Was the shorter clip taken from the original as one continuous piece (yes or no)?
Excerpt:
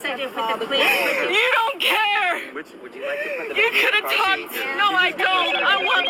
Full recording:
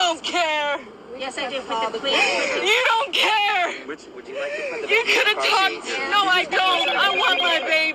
yes